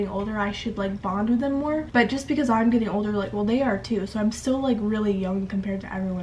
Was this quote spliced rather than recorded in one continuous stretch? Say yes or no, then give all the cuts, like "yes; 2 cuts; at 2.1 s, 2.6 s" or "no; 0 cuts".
no; 0 cuts